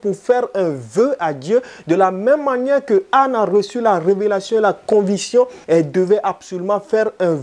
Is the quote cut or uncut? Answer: cut